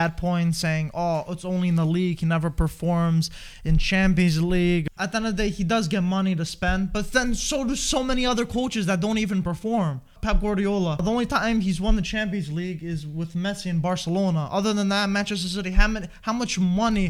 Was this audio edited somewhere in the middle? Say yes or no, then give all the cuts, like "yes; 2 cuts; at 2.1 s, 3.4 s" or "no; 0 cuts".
yes; 3 cuts; at 4.8 s, 10.2 s, 11.0 s